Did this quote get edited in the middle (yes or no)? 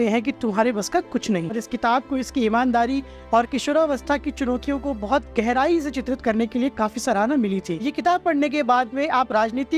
yes